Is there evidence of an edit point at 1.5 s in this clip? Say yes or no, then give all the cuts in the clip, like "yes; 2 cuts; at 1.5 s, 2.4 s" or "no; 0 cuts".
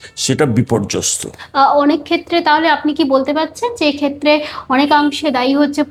no; 0 cuts